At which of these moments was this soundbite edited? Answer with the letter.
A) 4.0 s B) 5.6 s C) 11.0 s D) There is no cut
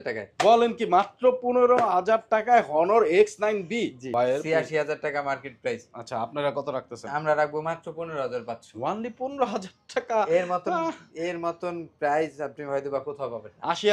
A